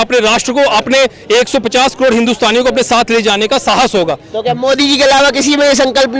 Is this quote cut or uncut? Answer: uncut